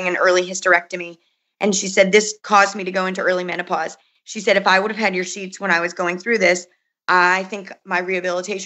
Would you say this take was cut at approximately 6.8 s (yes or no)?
no